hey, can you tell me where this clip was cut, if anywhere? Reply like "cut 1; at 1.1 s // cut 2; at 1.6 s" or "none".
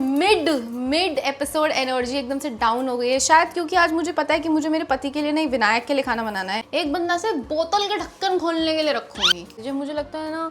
cut 1; at 6.6 s // cut 2; at 9.6 s